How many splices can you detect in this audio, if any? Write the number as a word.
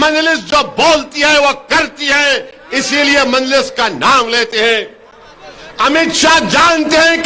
zero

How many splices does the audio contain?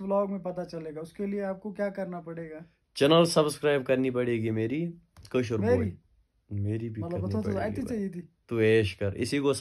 zero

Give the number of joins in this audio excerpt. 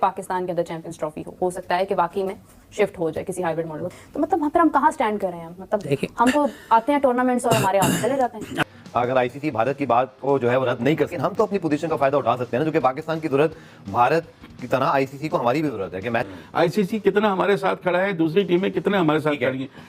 three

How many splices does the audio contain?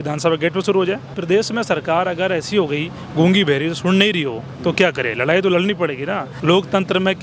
two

